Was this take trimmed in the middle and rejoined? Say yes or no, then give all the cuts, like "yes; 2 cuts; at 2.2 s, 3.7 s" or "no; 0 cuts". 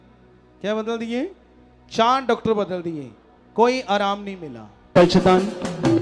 yes; 1 cut; at 5.0 s